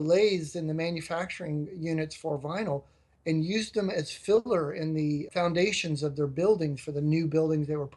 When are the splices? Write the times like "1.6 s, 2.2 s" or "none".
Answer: 5.3 s